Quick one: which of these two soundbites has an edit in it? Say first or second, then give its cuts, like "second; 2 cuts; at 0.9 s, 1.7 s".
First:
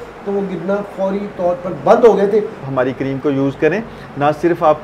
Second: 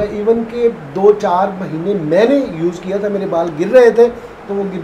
first; 1 cut; at 2.6 s